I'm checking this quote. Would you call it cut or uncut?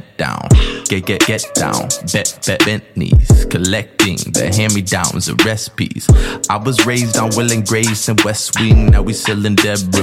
uncut